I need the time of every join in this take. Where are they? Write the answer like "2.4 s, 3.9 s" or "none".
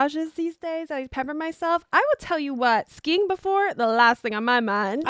none